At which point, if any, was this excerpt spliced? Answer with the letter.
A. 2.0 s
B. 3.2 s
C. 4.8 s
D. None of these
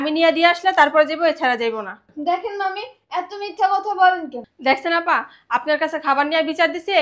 D